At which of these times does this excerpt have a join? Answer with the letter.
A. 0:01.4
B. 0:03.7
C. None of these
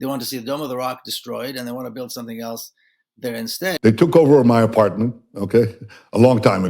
B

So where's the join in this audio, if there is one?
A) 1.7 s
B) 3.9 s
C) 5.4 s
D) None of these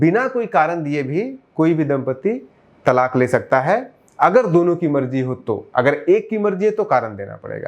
D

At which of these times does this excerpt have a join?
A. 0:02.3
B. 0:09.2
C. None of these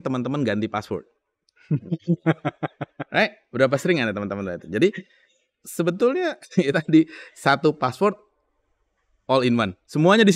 C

